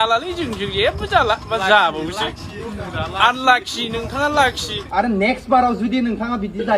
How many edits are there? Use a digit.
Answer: 1